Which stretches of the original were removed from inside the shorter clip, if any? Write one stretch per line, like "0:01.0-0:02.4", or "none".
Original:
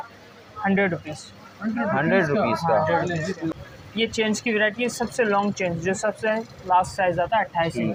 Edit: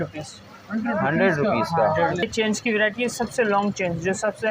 0:03.1-0:04.0